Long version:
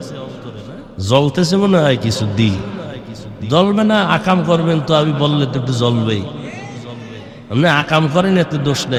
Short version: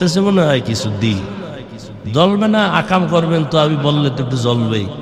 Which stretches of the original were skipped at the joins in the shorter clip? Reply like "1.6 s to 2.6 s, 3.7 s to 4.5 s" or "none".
none